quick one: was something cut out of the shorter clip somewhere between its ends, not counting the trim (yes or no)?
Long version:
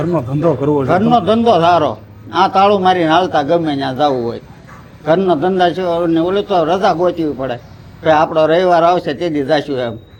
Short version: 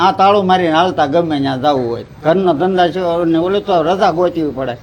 yes